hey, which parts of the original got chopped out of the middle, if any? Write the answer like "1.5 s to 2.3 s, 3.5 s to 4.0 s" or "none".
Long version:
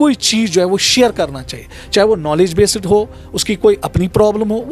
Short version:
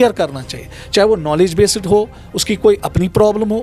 none